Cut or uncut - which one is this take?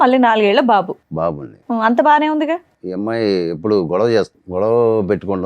cut